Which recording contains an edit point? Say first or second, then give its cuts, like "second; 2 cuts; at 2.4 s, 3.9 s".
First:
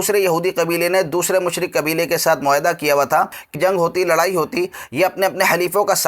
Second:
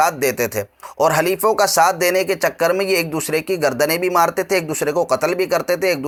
first; 1 cut; at 3.5 s